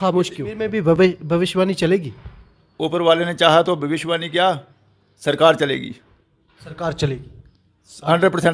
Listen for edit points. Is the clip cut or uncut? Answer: cut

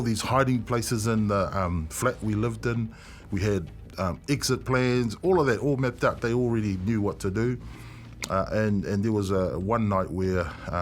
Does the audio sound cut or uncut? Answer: uncut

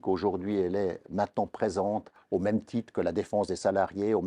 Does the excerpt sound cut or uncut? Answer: cut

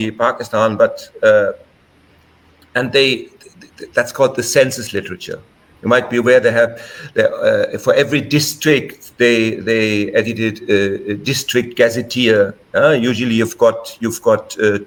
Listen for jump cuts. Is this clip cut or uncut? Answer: uncut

